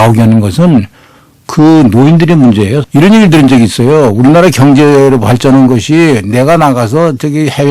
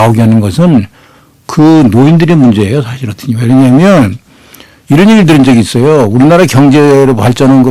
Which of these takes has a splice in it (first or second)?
first